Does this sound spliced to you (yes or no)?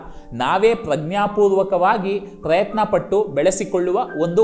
no